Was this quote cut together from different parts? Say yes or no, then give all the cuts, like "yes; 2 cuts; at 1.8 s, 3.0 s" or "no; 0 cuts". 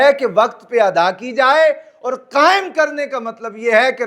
no; 0 cuts